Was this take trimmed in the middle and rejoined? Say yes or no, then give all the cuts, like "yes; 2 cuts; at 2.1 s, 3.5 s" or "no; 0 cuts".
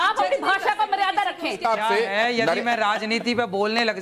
yes; 1 cut; at 1.5 s